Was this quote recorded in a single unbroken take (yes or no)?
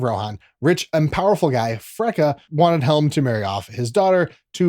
no